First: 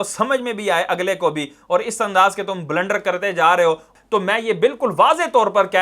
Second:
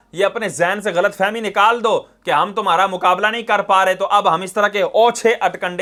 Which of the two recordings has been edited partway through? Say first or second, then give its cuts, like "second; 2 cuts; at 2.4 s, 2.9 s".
first; 1 cut; at 3.9 s